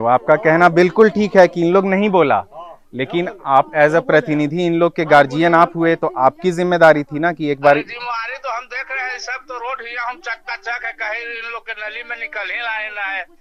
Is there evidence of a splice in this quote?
no; 0 cuts

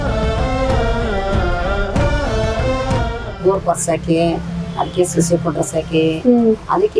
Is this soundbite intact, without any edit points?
no; 1 cut; at 3.4 s

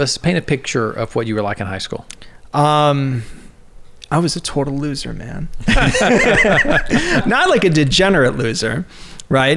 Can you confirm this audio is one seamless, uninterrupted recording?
yes; 0 cuts

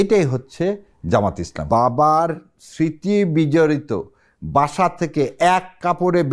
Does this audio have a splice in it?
yes; 1 cut; at 1.6 s

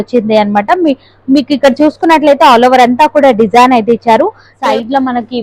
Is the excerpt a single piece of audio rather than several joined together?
no; 1 cut; at 4.5 s

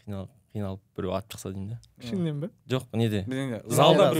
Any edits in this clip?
no; 0 cuts

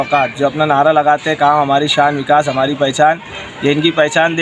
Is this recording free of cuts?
yes; 0 cuts

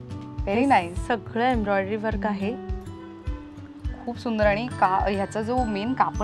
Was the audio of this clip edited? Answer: no; 0 cuts

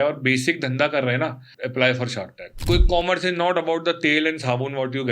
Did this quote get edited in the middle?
yes; 2 cuts; at 1.4 s, 2.5 s

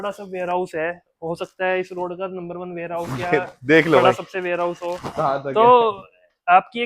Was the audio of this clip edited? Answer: no; 0 cuts

